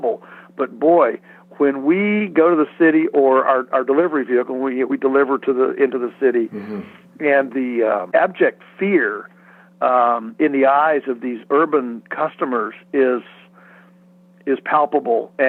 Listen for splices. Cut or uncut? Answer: uncut